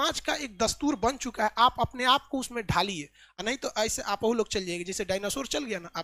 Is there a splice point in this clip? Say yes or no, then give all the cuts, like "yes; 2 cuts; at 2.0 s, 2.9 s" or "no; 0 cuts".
no; 0 cuts